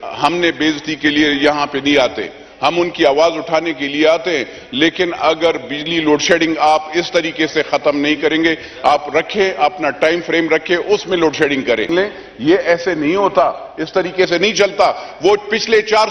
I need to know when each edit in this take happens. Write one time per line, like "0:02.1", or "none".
0:11.9